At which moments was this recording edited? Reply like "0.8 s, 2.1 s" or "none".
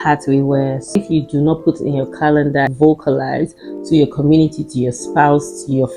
1.0 s, 2.7 s